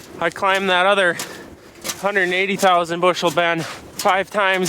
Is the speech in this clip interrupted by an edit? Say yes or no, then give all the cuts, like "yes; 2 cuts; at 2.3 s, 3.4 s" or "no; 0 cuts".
no; 0 cuts